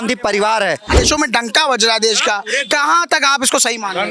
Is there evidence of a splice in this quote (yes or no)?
yes